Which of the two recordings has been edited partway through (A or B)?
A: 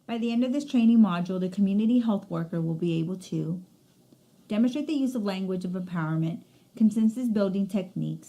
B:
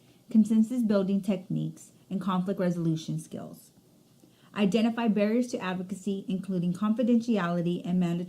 B